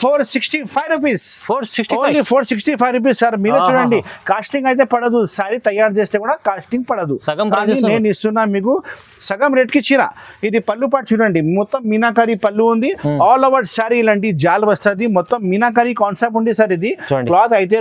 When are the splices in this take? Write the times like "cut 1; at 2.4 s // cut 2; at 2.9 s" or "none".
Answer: none